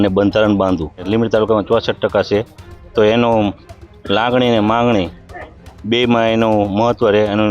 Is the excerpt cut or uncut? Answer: cut